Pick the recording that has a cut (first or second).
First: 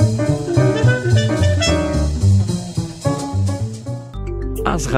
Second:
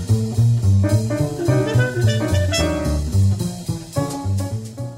first